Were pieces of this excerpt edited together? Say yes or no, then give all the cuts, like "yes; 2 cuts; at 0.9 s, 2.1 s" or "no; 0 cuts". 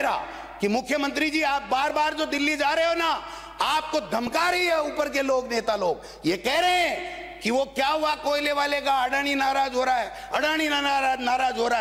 no; 0 cuts